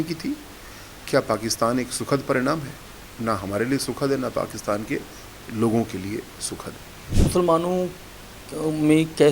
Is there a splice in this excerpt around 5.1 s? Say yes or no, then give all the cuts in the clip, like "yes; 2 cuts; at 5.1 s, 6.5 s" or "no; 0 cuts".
no; 1 cut; at 7.1 s